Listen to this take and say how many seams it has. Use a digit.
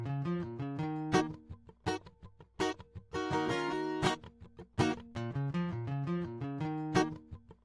2